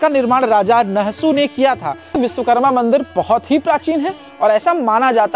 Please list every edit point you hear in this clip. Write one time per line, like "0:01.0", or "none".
0:02.1